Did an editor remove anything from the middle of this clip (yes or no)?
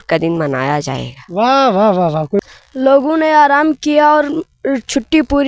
yes